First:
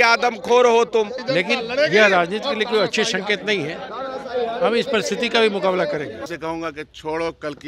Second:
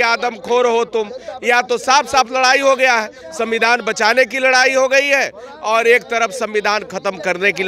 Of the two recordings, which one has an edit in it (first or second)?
first